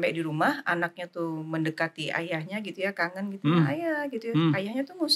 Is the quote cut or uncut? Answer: uncut